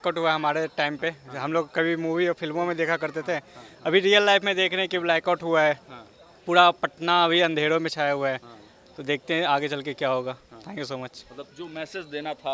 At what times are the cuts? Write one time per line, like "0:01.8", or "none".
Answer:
none